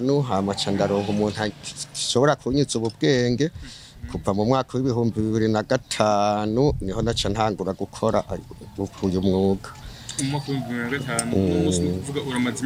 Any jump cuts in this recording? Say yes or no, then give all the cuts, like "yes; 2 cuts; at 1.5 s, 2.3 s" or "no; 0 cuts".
no; 0 cuts